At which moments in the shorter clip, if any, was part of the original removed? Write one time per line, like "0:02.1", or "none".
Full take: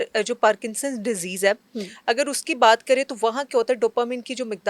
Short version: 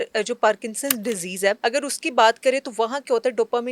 0:01.6